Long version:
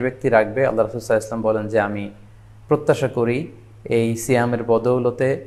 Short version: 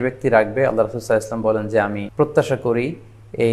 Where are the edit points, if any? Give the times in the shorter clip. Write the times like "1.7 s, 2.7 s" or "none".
2.0 s